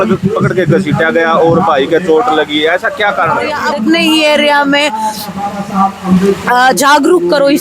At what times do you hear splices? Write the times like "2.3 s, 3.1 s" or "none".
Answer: 3.6 s